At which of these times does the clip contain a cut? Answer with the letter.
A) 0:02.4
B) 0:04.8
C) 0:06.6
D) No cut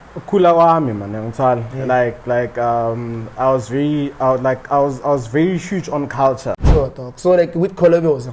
C